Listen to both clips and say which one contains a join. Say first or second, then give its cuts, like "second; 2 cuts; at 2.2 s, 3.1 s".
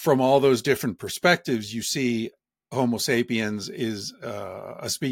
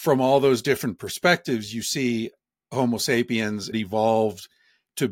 second; 1 cut; at 3.7 s